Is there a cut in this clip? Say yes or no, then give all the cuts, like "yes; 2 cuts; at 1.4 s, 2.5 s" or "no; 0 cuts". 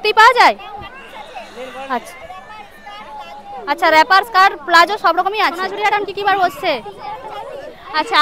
yes; 1 cut; at 5.6 s